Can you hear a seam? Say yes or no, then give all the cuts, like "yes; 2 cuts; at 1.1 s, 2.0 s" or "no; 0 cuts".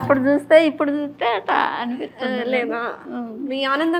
no; 0 cuts